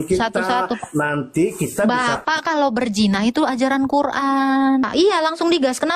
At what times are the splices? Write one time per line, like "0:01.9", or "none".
0:04.8